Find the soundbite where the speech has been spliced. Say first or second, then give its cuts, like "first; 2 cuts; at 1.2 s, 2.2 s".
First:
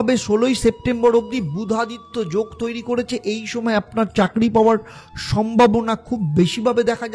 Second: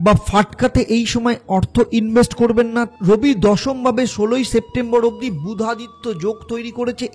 second; 1 cut; at 2.9 s